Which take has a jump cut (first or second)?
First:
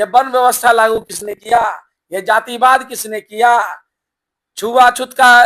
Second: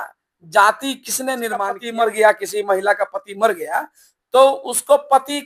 second